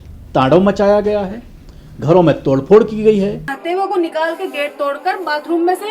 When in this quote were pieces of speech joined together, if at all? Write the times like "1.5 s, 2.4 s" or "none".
3.5 s